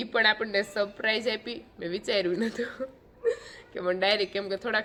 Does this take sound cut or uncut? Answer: uncut